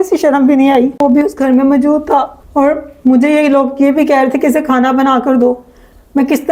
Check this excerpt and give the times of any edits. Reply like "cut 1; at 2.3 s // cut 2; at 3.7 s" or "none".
cut 1; at 1.0 s